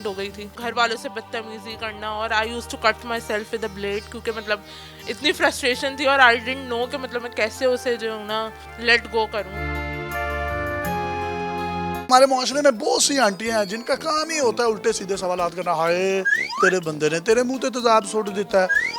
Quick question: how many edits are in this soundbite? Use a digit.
1